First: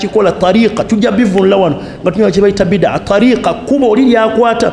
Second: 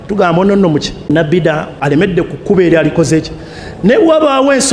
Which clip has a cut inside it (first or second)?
second